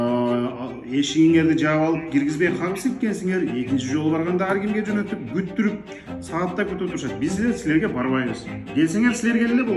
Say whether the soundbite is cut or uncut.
uncut